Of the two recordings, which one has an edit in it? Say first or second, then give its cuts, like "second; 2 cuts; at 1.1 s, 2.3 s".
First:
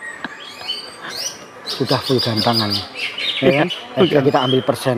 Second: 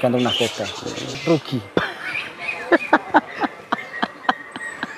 second; 1 cut; at 1.2 s